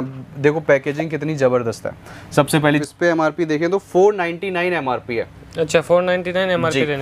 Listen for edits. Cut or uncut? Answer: cut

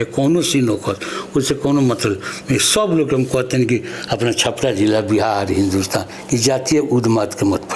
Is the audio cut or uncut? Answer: uncut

